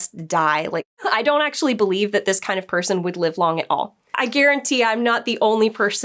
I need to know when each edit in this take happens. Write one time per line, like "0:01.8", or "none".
0:00.9
0:04.0